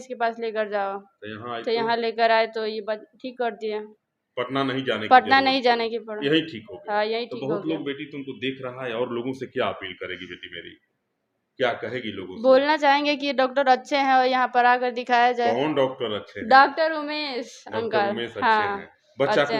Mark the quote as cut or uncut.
uncut